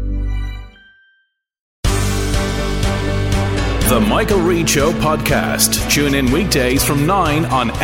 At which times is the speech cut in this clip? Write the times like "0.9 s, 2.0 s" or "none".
1.7 s